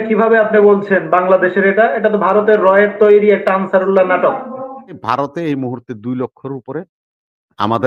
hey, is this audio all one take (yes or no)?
no